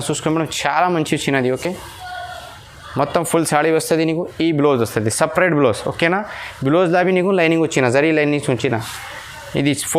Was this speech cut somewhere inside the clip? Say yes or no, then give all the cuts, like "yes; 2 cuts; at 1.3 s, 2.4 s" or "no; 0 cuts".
no; 0 cuts